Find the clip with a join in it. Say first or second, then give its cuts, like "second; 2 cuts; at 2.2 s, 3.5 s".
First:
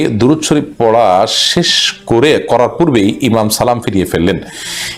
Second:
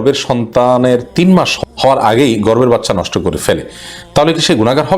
second; 1 cut; at 1.5 s